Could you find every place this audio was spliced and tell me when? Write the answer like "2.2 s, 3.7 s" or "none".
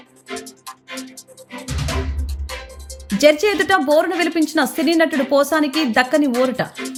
none